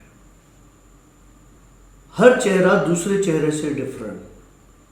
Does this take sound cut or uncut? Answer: cut